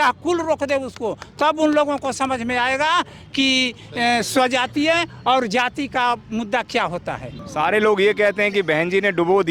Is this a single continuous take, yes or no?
no